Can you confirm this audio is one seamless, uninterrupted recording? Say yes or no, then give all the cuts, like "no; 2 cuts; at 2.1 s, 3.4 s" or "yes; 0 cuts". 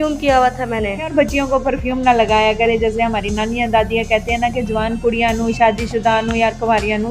no; 1 cut; at 1.1 s